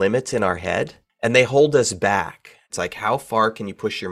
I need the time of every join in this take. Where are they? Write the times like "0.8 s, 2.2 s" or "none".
1.1 s, 2.7 s